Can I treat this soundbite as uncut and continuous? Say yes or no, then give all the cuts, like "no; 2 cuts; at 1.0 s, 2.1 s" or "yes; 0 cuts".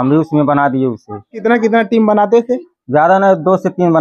no; 1 cut; at 1.4 s